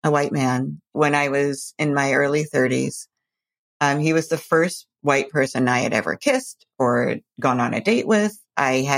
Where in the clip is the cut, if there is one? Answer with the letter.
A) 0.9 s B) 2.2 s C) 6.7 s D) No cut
A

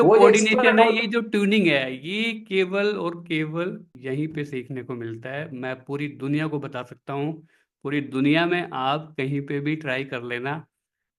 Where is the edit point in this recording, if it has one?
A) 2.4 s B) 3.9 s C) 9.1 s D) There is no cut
B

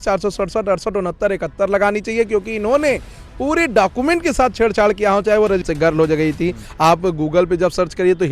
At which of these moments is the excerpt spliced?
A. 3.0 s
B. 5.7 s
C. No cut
B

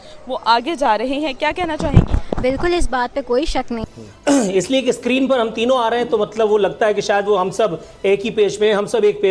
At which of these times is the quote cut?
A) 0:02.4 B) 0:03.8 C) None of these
B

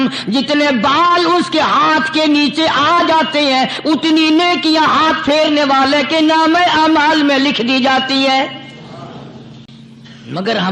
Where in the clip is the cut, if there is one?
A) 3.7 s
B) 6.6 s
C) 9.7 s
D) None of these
C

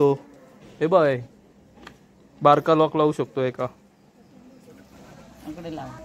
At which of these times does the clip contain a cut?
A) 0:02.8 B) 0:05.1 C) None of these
B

